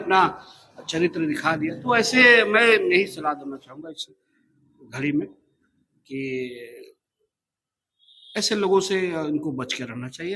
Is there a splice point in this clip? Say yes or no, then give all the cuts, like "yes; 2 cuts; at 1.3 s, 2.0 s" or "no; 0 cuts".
no; 0 cuts